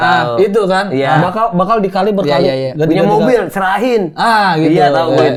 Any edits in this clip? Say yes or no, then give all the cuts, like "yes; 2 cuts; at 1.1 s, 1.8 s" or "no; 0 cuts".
no; 0 cuts